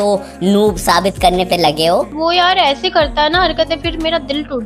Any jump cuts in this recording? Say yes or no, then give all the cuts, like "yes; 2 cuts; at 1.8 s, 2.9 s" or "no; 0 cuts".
yes; 1 cut; at 2.1 s